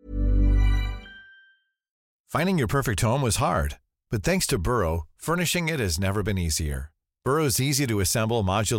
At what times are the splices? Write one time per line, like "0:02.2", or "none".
0:02.1